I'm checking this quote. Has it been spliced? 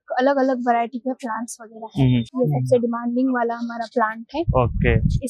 yes; 1 cut; at 2.3 s

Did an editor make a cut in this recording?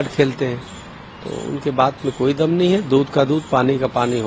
no; 0 cuts

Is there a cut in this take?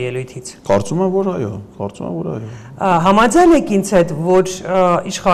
no; 0 cuts

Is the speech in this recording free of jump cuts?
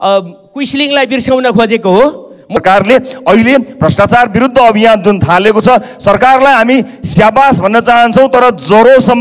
no; 1 cut; at 2.6 s

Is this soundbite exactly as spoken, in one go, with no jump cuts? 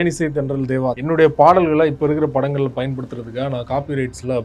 no; 1 cut; at 1.0 s

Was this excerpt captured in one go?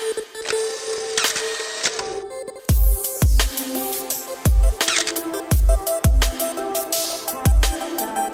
yes; 0 cuts

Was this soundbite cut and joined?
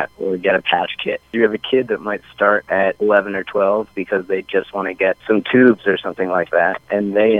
yes; 3 cuts; at 1.3 s, 2.7 s, 5.2 s

